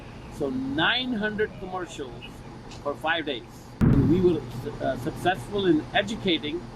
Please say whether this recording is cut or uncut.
cut